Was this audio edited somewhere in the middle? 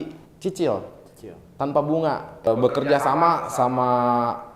yes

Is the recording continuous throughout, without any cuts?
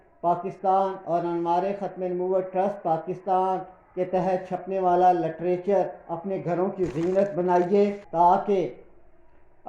no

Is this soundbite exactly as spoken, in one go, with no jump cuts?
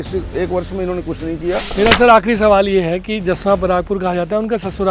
yes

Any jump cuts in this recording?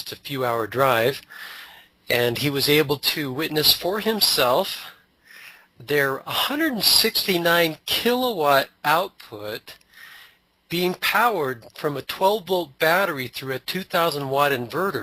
yes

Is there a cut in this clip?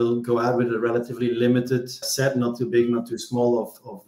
yes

